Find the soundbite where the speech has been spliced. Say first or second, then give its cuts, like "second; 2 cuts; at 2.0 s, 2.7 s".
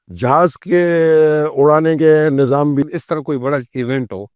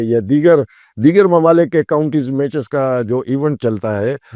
first; 1 cut; at 2.8 s